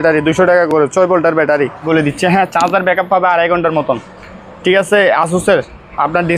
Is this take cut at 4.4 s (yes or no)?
no